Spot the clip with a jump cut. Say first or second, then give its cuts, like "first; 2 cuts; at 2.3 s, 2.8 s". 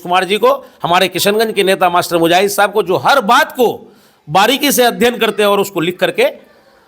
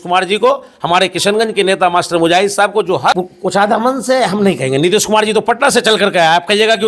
second; 1 cut; at 3.0 s